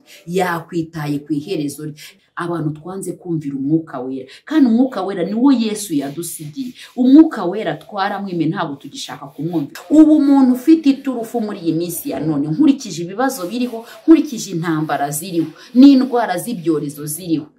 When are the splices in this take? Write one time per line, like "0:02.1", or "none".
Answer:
0:02.0
0:09.7